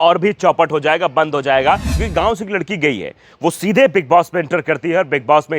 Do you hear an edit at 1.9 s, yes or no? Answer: yes